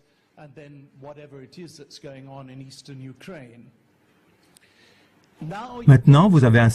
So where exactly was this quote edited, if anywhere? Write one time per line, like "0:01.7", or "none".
none

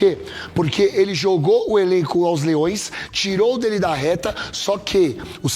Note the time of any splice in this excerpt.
none

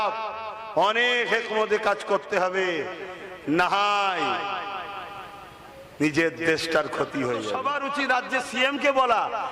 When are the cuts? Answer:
0:07.5

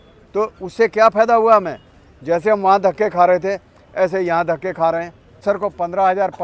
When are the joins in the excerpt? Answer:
0:05.4

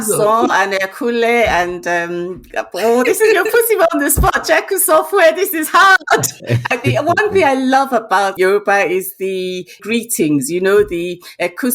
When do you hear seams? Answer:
0:06.3
0:08.3
0:09.8

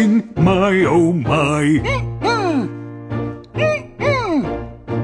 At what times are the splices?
0:01.7

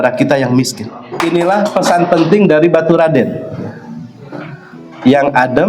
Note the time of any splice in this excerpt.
0:01.1

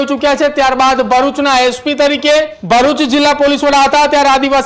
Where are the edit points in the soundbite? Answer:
0:02.6

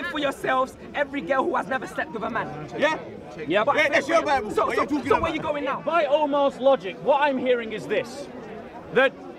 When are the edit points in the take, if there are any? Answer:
0:05.8

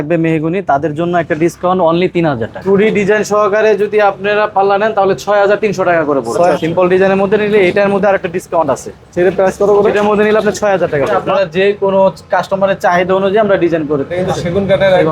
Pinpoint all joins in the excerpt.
0:02.5
0:06.5
0:11.2
0:14.2

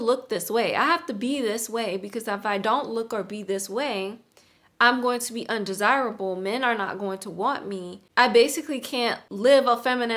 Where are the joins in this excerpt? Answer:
0:07.9
0:09.2

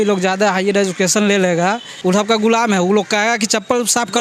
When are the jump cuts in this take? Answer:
0:01.9

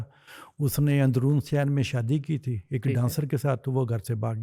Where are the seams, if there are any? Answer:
none

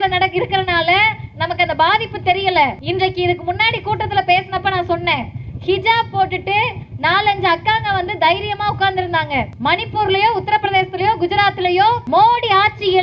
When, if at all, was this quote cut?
0:02.8
0:09.5
0:12.0

